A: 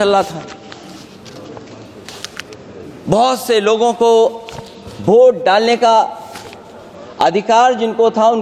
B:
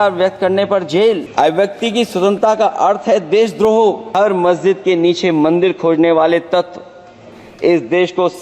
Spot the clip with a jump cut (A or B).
B